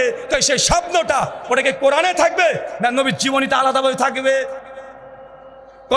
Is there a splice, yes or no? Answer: no